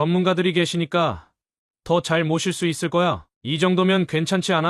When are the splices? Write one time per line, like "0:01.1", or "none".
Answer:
0:03.3